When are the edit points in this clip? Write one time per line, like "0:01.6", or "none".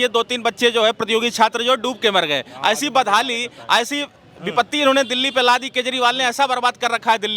none

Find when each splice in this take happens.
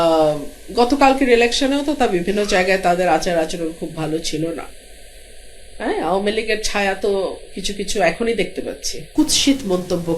0:09.0

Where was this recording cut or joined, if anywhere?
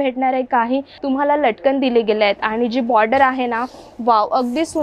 0:00.9

